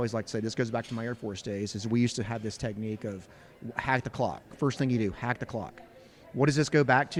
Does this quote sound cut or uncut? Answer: uncut